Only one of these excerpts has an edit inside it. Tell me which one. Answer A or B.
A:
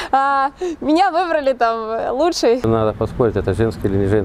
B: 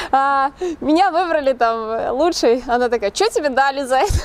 A